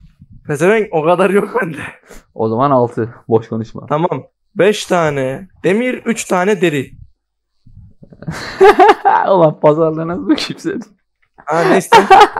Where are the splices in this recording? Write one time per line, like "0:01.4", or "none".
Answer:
none

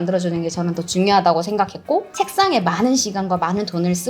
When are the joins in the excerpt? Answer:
0:02.1

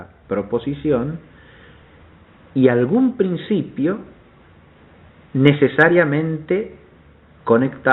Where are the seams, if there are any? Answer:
0:06.1

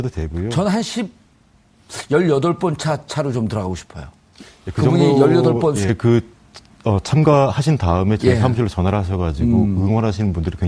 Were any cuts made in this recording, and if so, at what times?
none

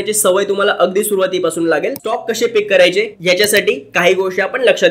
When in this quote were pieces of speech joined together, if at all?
0:02.0

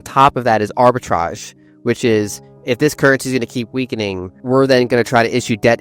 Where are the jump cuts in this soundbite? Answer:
0:04.3

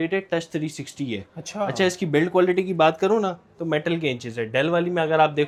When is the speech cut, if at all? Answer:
none

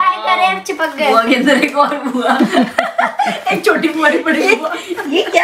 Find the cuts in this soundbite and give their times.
none

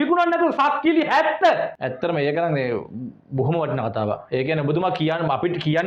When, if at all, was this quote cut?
none

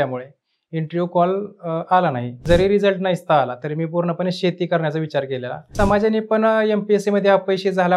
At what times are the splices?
0:02.4
0:05.7

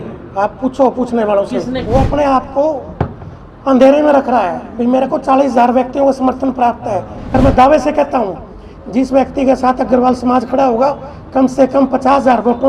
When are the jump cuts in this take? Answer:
0:01.8
0:07.4

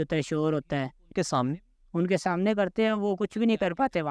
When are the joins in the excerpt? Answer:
none

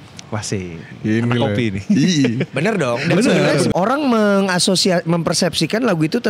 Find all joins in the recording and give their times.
0:03.7

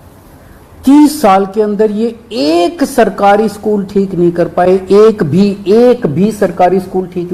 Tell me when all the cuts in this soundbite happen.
none

